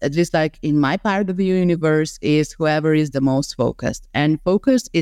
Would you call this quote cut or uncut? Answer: uncut